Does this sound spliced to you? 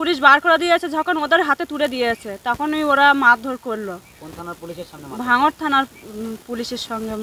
no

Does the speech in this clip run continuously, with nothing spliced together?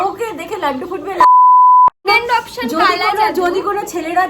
no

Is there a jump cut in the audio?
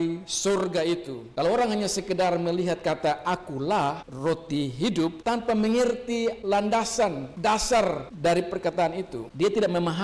yes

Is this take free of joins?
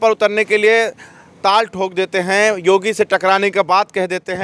yes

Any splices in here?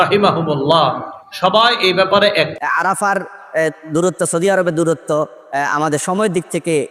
yes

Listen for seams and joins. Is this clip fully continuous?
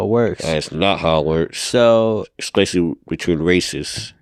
yes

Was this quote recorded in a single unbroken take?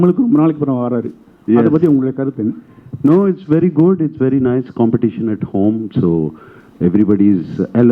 yes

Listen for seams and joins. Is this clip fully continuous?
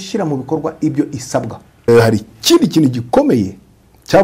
no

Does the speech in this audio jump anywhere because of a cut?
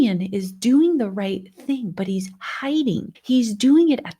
yes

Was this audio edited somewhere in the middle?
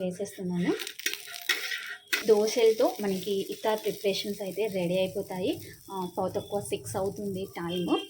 yes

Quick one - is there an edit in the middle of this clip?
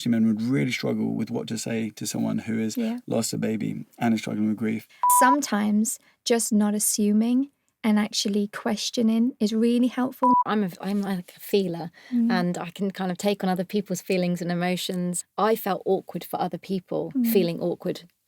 yes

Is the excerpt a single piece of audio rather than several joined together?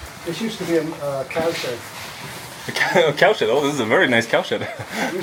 yes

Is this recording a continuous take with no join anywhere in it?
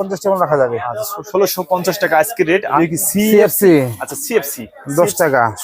no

